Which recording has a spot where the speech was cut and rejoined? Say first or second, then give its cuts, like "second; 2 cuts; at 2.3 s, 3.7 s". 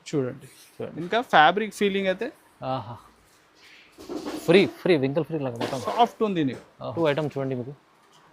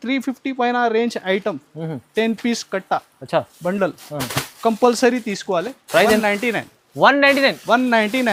first; 1 cut; at 6.9 s